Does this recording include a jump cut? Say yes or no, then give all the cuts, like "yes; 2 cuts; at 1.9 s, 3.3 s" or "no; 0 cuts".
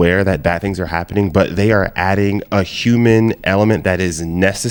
no; 0 cuts